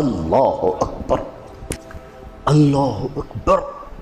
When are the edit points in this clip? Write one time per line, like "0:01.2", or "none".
0:01.8